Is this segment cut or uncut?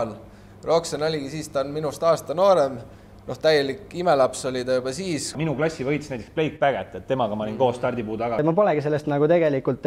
cut